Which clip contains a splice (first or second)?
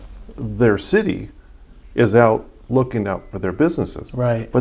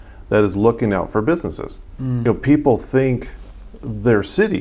second